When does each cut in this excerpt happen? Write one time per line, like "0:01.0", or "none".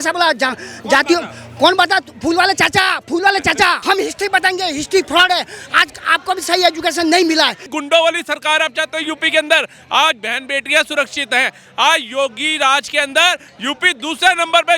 0:03.8
0:07.7